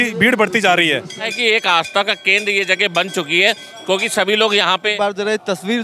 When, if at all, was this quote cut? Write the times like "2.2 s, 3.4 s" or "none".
1.3 s, 4.9 s